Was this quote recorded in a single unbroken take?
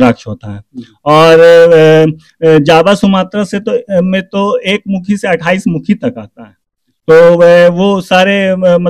yes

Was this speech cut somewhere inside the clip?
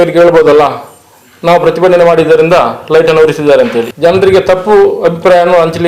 yes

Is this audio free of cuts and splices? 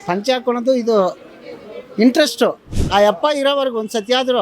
no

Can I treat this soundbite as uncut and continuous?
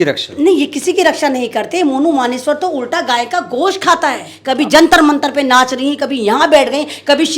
no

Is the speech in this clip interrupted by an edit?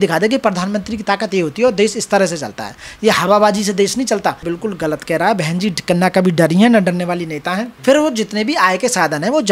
yes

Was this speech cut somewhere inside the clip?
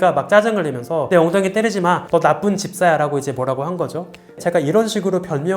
yes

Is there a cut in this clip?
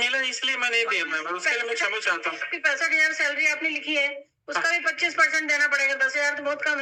no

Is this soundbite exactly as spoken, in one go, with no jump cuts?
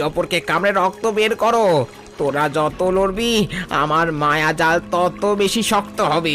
yes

